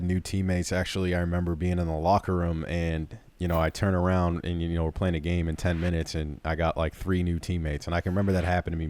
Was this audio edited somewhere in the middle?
no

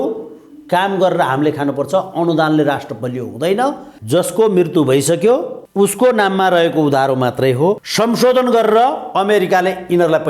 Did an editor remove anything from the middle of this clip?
yes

